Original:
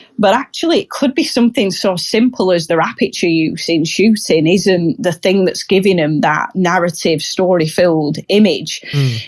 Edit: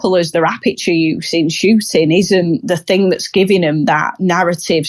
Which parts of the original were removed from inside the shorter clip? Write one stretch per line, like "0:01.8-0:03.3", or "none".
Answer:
none